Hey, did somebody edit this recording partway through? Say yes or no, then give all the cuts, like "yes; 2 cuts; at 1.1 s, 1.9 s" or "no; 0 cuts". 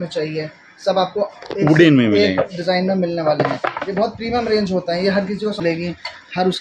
yes; 1 cut; at 5.6 s